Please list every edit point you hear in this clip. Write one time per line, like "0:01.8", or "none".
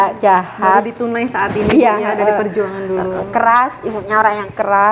none